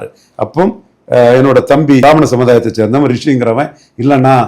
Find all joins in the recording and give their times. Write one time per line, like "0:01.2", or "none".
0:02.0